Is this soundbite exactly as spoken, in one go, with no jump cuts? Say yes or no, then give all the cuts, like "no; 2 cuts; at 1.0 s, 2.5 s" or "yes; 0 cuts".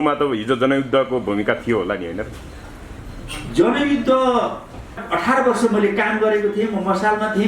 no; 1 cut; at 5.0 s